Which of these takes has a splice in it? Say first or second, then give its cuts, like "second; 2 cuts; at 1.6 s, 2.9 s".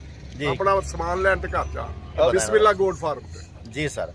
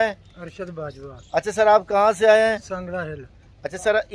first; 1 cut; at 2.3 s